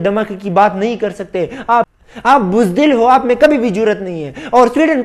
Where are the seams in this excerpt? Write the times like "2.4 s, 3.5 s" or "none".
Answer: 1.9 s